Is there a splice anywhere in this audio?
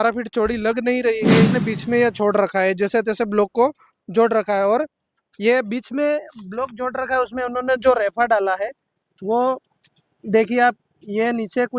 yes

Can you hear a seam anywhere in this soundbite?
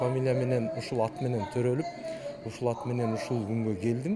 no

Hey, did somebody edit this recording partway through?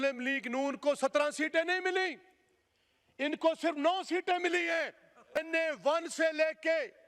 yes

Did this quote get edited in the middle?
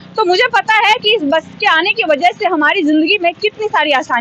no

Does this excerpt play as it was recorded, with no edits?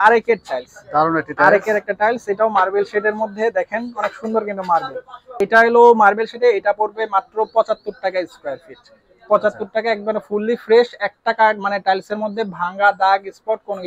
yes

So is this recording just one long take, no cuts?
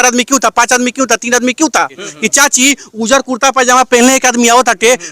no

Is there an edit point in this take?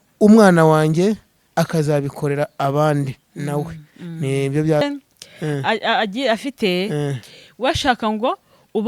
yes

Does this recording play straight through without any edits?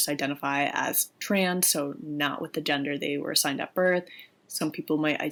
yes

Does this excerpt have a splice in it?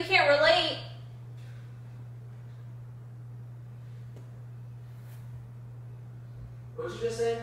no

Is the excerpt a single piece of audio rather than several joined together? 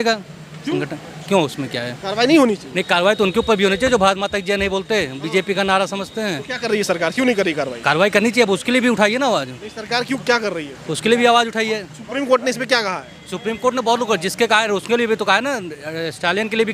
yes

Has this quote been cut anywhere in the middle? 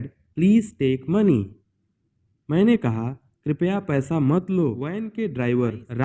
yes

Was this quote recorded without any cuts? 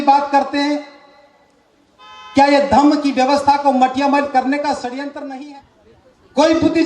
no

